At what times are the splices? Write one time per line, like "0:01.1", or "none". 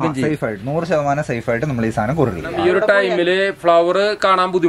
0:02.5